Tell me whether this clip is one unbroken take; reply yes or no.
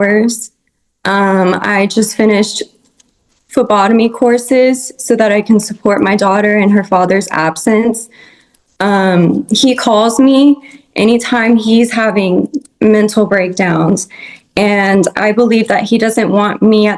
yes